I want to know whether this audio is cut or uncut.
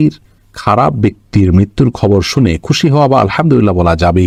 uncut